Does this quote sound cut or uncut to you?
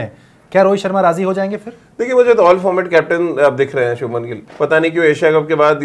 cut